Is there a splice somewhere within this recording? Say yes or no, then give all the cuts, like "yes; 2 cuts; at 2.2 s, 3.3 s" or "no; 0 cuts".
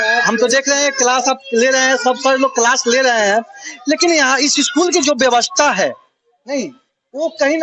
no; 0 cuts